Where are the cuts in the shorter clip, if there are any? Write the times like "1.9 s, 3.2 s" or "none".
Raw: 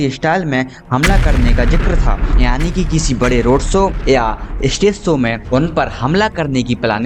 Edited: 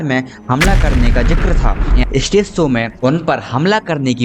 2.0 s